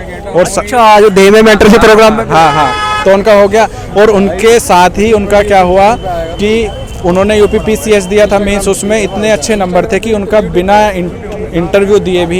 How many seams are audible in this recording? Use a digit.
0